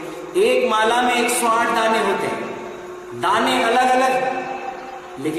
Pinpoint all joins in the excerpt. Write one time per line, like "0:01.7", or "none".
none